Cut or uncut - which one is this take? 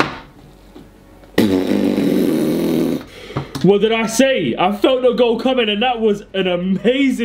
uncut